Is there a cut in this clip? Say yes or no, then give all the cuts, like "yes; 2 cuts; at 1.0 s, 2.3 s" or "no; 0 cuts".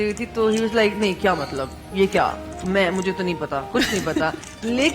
no; 0 cuts